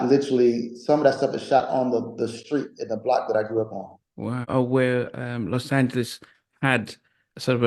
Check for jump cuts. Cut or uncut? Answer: cut